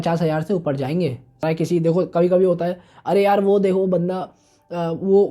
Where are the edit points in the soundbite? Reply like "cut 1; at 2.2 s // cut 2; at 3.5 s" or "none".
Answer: cut 1; at 1.4 s